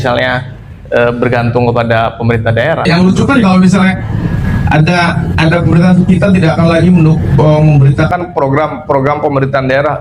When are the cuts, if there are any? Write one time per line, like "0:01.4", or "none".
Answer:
0:02.9